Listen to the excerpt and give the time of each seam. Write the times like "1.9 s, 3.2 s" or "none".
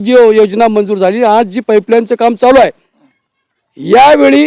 none